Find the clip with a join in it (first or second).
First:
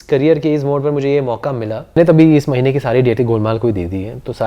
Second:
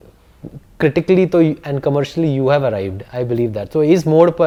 first